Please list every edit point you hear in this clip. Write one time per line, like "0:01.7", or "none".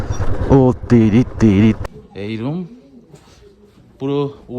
0:01.8